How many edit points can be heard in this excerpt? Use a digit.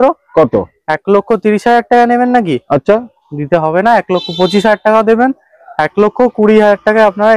0